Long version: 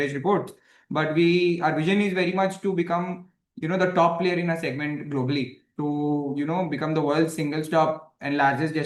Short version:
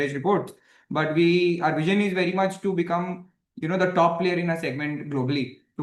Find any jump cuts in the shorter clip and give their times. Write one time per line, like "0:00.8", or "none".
none